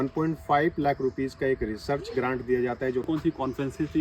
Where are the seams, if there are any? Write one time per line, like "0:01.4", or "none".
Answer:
0:03.1